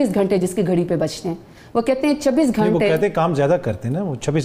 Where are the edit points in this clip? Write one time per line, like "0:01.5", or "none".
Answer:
none

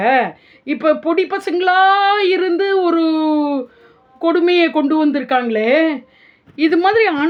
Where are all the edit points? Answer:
none

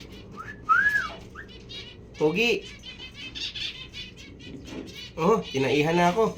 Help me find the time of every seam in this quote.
none

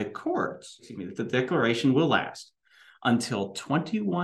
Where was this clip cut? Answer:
0:01.0

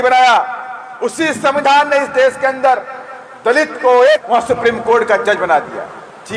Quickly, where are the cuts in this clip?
0:04.2

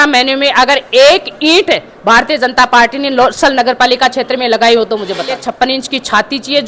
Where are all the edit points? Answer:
0:05.4

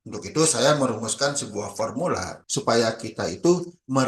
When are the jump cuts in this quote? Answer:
0:02.3

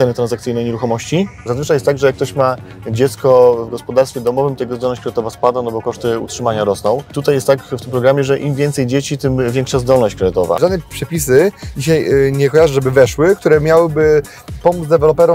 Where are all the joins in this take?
0:01.5
0:07.2
0:10.6

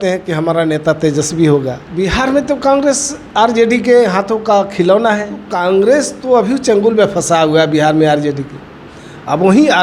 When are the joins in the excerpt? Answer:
0:01.8
0:05.4

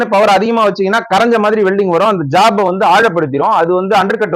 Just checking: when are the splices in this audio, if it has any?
none

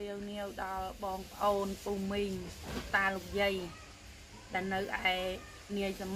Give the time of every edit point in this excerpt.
none

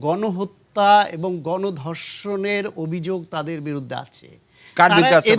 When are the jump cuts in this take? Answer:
none

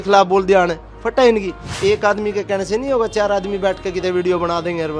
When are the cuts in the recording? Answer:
0:01.6

